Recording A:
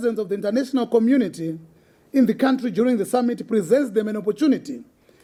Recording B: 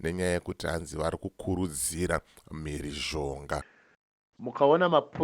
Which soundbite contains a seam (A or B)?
B